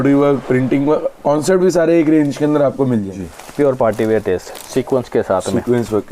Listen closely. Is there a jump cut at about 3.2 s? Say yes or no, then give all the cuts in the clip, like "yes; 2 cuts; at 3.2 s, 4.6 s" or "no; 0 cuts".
yes; 1 cut; at 3.2 s